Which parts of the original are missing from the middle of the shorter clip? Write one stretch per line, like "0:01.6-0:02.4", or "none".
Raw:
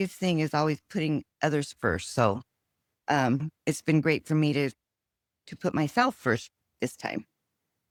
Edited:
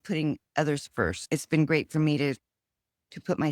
0:02.0-0:03.5